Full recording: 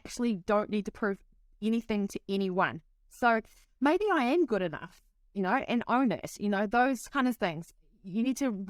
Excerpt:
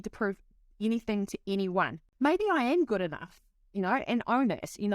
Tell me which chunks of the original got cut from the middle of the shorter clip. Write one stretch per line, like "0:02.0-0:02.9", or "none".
0:02.8-0:03.6